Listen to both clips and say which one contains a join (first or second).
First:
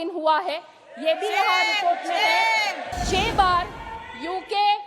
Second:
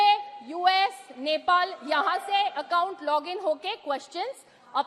first